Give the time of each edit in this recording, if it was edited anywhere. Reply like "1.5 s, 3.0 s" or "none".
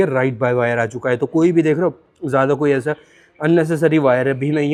none